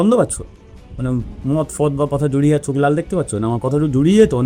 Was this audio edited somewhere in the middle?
no; 0 cuts

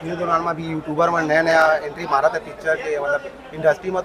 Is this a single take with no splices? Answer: yes; 0 cuts

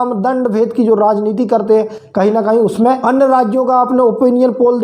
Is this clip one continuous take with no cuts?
no; 1 cut; at 3.0 s

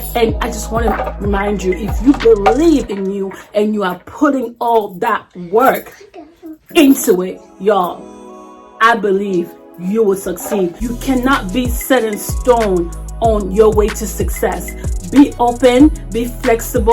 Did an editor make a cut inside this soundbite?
yes; 1 cut; at 10.8 s

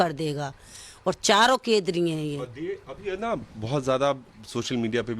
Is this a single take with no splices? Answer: yes; 0 cuts

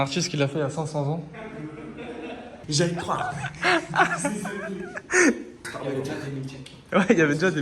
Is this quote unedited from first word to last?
no; 2 cuts; at 2.5 s, 5.6 s

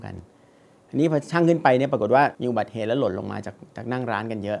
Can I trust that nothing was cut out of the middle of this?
no; 1 cut; at 2.4 s

